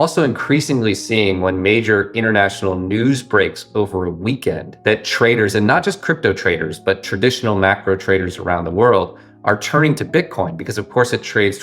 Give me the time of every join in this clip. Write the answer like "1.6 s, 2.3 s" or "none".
4.7 s